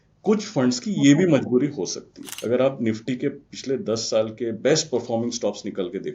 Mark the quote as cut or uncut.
cut